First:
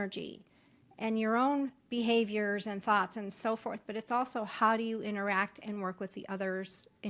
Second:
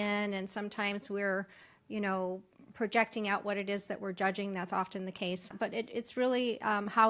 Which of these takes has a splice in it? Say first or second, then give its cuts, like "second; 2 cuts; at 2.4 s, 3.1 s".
second; 1 cut; at 5.5 s